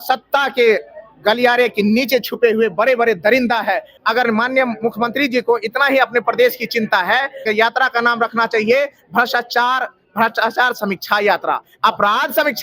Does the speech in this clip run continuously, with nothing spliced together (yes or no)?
no